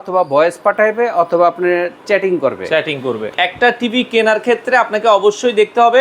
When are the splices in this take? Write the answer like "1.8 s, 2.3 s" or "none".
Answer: 3.3 s